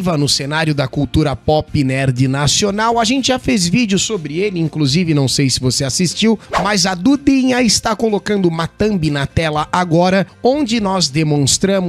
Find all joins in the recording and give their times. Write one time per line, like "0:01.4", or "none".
none